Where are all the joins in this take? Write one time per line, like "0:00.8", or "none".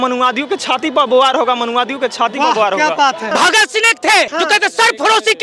0:03.3
0:04.3

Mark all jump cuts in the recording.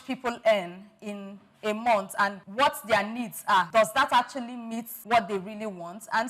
0:02.4
0:03.7
0:04.9

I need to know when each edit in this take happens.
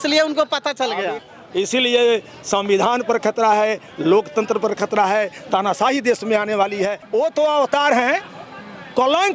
0:01.2
0:07.0

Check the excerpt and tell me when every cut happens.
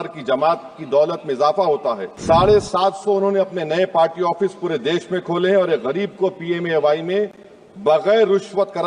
0:02.1

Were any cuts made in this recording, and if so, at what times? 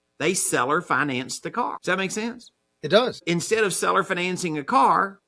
0:01.8
0:03.2

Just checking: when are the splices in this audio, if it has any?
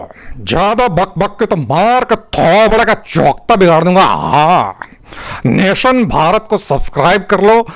none

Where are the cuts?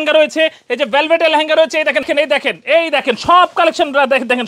0:02.1

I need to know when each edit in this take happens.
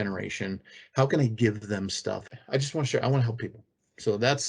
0:02.2

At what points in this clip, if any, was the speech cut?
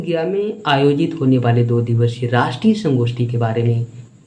none

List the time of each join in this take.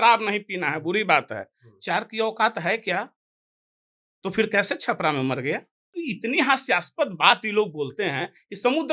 0:05.8

